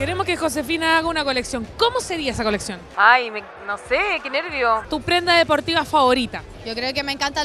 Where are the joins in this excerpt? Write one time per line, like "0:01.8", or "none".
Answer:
0:04.8